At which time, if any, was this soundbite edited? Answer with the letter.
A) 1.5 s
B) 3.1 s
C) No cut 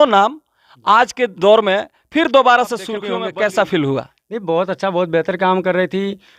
B